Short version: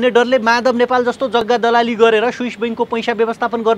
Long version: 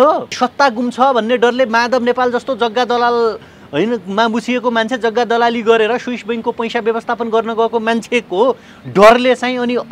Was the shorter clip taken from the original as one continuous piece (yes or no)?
no